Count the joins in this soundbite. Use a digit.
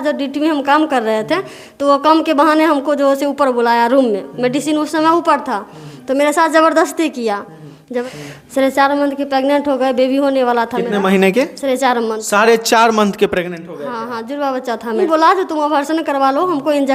2